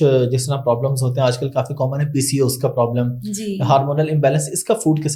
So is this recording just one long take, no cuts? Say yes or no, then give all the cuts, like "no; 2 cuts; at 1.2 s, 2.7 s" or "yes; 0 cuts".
yes; 0 cuts